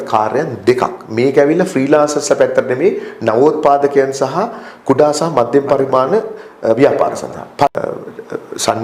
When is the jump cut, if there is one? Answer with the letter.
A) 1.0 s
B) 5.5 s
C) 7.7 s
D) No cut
C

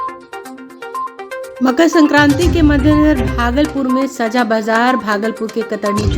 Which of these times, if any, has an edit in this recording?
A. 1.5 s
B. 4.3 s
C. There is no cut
C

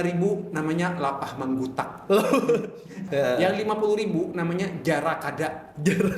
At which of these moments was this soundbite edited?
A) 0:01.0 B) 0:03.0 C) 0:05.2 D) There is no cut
B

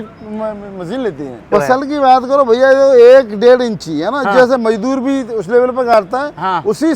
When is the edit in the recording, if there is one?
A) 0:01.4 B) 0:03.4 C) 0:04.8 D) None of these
A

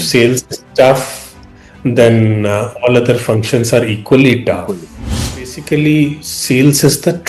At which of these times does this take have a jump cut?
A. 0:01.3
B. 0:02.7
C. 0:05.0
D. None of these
C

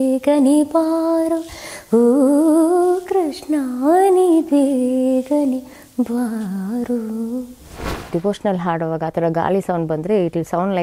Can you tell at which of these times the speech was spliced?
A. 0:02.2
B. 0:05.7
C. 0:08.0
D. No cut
C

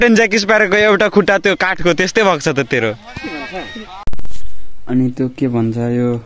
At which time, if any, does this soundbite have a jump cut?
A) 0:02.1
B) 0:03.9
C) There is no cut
B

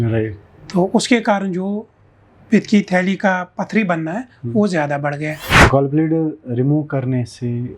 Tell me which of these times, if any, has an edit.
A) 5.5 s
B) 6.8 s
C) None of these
A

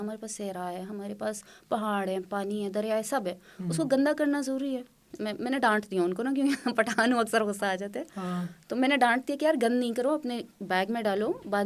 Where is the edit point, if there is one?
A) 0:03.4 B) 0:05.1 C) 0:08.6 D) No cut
B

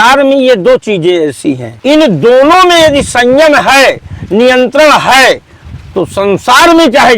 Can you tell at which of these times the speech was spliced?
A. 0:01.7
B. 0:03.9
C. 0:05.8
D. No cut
A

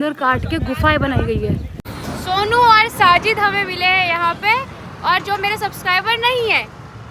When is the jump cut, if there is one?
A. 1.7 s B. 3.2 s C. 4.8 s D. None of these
A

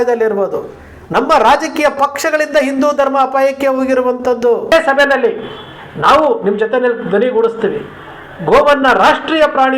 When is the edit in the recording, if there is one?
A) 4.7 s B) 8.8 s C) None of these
A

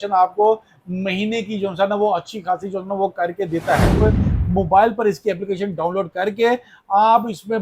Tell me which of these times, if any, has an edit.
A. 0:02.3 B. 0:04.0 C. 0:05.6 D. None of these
B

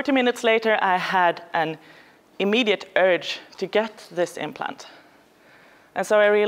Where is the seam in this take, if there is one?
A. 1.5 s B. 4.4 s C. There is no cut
B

